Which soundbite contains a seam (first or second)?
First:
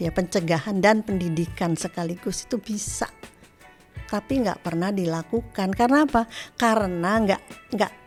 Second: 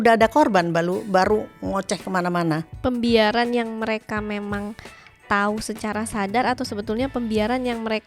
second